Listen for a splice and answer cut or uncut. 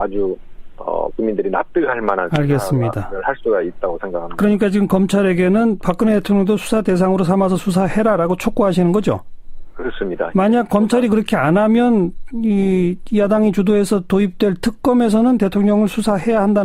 cut